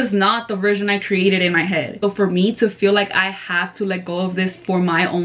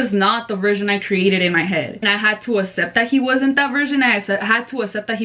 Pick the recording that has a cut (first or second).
first